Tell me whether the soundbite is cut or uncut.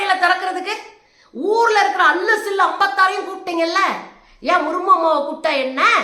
uncut